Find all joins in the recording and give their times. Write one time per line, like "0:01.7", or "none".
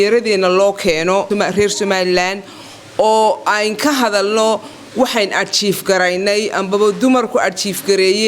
0:01.3

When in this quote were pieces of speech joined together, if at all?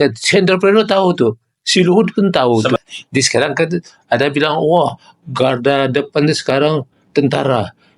0:02.8

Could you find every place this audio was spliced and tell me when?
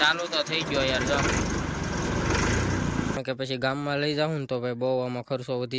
0:03.2

